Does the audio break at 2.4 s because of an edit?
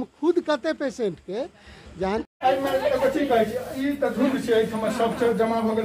yes; 1 cut; at 2.4 s

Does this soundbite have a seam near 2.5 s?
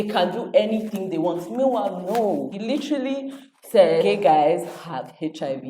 yes; 1 cut; at 2.5 s

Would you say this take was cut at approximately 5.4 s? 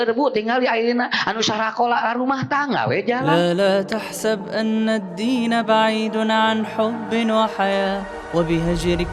no; 1 cut; at 3.3 s

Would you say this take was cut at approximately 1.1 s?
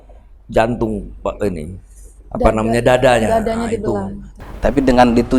no; 1 cut; at 4.2 s

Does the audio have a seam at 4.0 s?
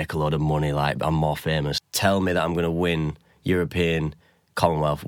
no; 1 cut; at 1.8 s

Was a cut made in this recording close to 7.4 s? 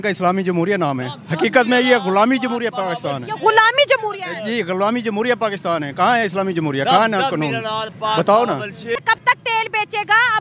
no; 1 cut; at 9.0 s

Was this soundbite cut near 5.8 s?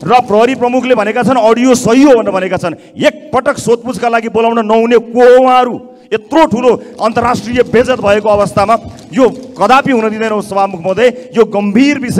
no; 0 cuts

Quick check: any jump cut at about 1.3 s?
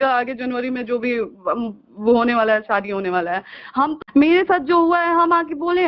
no; 1 cut; at 4.0 s

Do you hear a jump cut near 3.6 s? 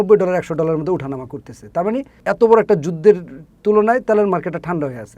no; 1 cut; at 2.1 s

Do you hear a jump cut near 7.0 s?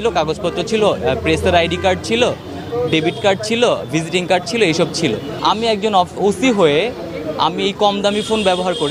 no; 1 cut; at 5.3 s

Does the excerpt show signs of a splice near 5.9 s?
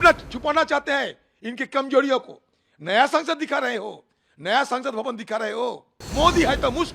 yes; 1 cut; at 5.9 s

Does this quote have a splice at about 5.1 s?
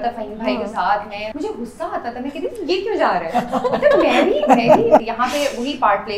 yes; 2 cuts; at 1.2 s, 5.1 s

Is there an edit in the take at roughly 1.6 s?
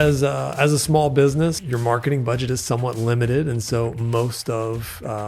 yes; 1 cut; at 1.6 s

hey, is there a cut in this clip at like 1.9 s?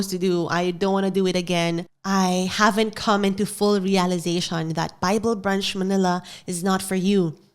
yes; 1 cut; at 1.9 s

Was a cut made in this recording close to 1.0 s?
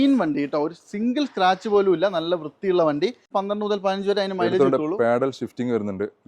no; 1 cut; at 3.2 s

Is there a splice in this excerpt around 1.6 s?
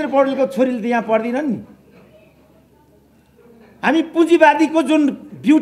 no; 0 cuts

